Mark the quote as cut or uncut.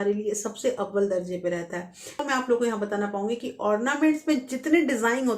cut